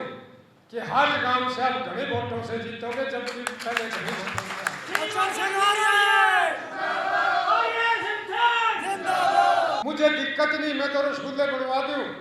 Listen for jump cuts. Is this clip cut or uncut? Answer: cut